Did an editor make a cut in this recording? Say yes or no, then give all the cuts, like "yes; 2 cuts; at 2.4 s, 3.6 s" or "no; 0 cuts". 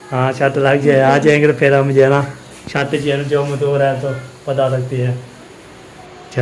no; 0 cuts